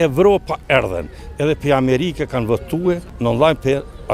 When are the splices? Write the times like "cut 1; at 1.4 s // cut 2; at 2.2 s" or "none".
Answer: cut 1; at 3.1 s